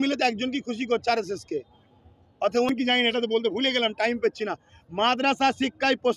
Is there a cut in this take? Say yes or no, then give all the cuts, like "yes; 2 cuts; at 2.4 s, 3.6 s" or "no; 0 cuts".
yes; 1 cut; at 2.7 s